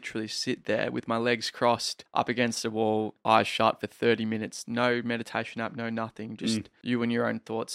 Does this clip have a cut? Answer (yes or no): yes